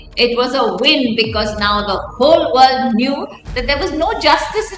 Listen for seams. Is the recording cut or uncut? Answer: uncut